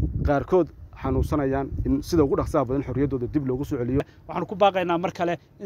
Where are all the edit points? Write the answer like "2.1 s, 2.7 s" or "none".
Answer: 4.1 s